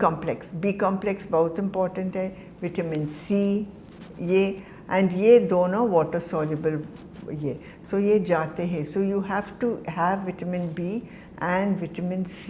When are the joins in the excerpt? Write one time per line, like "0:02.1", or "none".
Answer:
none

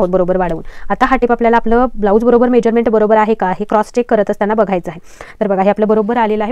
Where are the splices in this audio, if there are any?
none

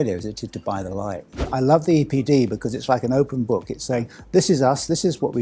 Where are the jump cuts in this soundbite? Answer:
0:01.3

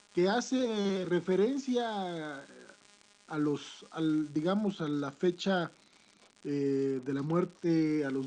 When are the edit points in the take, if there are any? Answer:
0:06.7

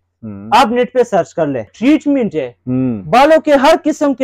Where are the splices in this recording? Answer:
0:01.7

